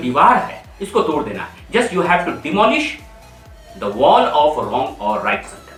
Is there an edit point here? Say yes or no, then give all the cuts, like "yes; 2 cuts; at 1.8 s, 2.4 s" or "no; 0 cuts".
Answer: no; 0 cuts